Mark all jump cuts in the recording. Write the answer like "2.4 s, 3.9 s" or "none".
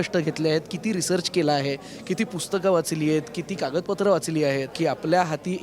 4.7 s